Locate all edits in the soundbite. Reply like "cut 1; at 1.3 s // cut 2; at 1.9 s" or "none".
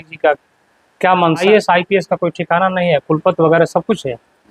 cut 1; at 1.4 s